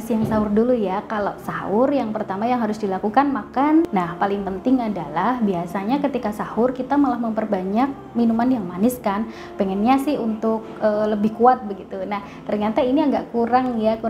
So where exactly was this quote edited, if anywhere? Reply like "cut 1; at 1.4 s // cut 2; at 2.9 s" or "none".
cut 1; at 3.9 s